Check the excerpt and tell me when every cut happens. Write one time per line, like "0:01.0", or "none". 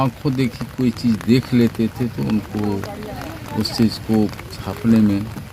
none